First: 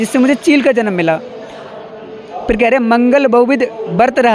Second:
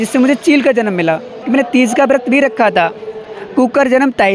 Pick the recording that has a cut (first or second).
second